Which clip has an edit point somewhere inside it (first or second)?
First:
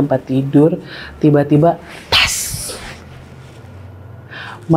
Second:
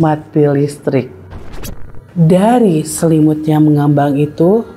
second